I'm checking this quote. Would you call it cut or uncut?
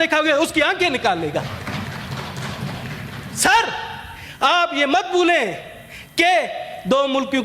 uncut